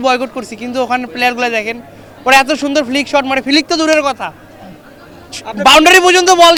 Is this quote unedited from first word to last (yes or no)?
yes